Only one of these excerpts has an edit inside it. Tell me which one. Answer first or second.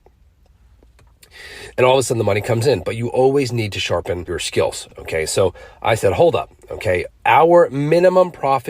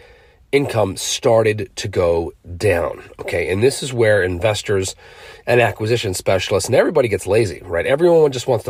first